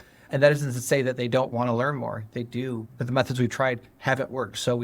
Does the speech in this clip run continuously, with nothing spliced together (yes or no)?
no